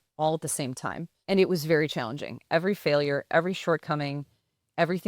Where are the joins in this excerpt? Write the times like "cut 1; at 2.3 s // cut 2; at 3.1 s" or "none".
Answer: cut 1; at 1.1 s // cut 2; at 2.4 s